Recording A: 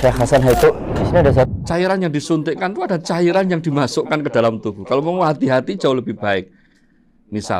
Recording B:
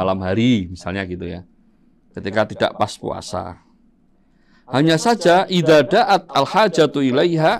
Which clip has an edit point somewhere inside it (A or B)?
A